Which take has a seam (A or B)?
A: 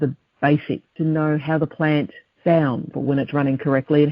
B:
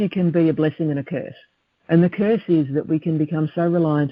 A